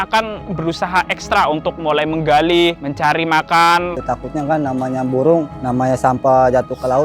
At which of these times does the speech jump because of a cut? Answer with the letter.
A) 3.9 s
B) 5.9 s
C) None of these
A